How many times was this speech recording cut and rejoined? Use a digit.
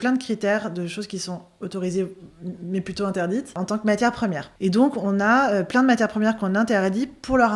2